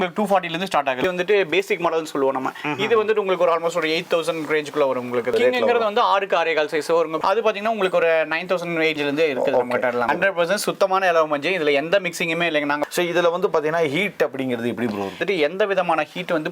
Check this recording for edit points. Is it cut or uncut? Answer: cut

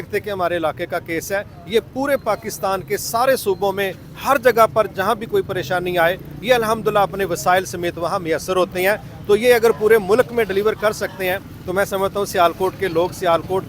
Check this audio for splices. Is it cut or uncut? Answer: uncut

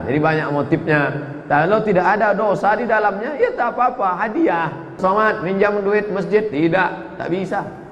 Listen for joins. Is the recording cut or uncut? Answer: cut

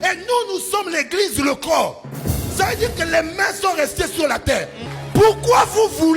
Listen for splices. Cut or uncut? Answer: cut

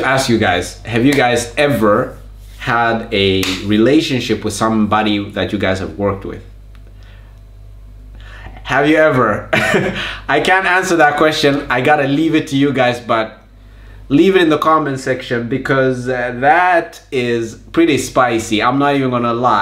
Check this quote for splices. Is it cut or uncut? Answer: uncut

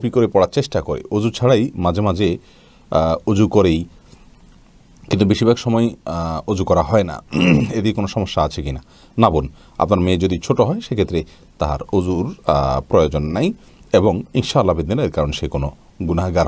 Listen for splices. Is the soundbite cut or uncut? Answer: uncut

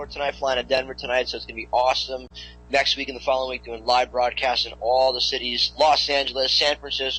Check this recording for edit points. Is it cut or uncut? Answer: cut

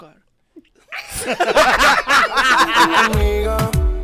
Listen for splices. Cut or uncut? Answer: cut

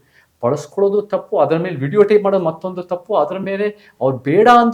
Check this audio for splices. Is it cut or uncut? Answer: uncut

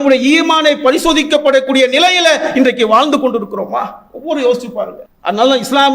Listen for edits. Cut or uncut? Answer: cut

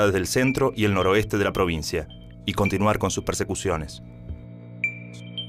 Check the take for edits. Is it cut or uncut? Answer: uncut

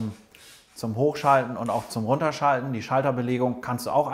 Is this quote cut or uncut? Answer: uncut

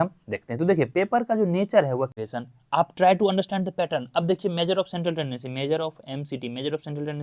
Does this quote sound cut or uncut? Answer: cut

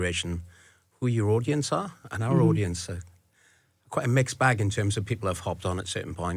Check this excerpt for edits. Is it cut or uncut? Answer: uncut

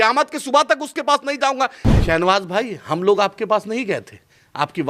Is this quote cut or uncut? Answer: cut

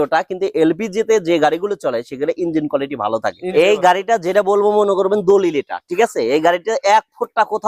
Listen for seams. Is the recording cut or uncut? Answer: cut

